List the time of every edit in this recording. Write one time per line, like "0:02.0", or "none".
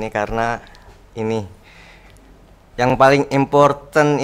none